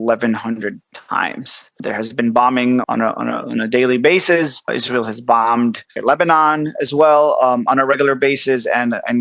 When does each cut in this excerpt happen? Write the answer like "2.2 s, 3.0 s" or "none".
1.8 s, 2.8 s, 4.8 s, 5.9 s